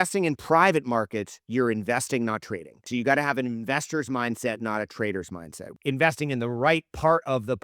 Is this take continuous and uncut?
no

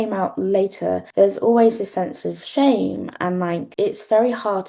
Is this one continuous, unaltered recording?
no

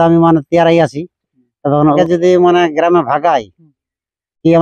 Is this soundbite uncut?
no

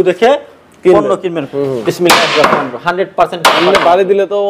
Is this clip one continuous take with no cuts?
no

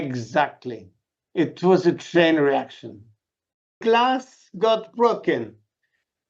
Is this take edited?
yes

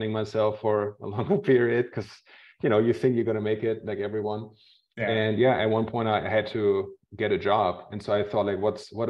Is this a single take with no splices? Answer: yes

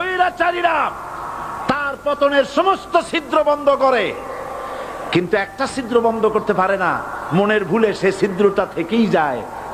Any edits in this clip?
no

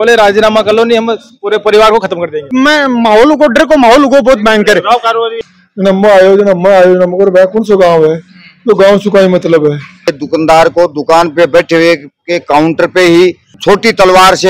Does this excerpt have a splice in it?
yes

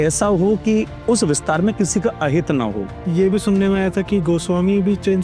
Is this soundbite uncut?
no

